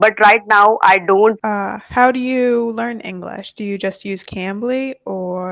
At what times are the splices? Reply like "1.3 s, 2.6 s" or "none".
1.4 s